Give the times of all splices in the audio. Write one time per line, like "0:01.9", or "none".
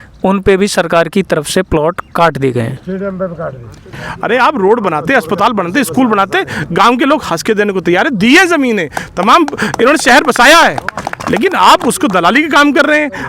0:04.1